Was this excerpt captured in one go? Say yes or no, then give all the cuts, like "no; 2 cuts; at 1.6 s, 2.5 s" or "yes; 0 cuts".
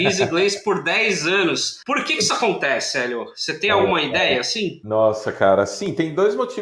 no; 2 cuts; at 1.7 s, 4.8 s